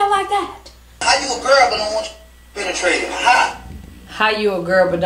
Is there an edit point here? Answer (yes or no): yes